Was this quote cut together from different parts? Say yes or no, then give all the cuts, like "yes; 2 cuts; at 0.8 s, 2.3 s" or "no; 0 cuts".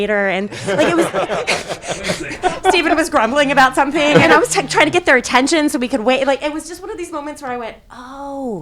yes; 2 cuts; at 2.4 s, 4.3 s